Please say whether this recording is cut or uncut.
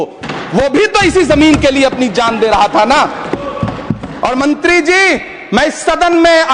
uncut